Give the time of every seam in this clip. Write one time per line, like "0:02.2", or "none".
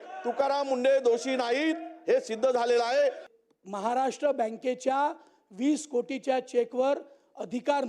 0:03.3